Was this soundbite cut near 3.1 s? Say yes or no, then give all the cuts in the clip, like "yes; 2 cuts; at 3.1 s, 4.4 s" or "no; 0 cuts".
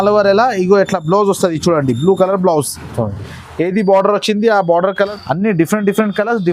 no; 1 cut; at 5.1 s